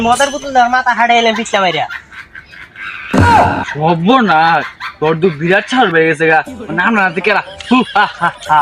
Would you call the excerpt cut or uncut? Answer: uncut